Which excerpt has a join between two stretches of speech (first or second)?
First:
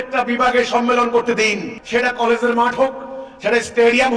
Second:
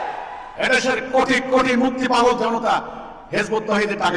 first